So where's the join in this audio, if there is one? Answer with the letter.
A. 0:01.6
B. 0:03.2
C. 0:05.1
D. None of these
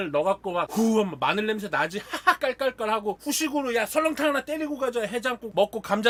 D